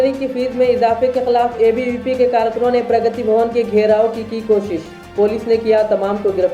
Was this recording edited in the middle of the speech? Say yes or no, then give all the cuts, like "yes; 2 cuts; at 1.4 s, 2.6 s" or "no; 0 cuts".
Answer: no; 0 cuts